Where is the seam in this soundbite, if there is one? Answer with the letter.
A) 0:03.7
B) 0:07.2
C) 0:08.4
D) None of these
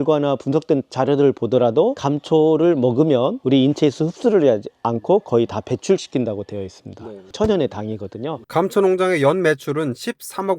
C